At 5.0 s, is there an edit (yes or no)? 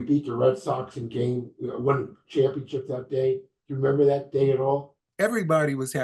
yes